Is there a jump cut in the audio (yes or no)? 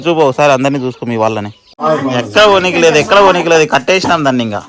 yes